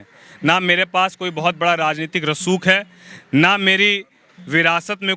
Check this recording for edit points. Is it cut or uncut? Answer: uncut